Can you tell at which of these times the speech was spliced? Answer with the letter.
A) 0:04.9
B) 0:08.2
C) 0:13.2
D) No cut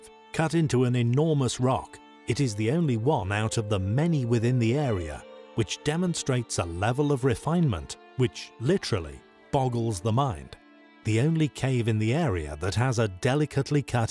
A